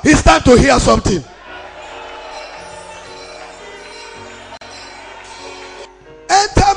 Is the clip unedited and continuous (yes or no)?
no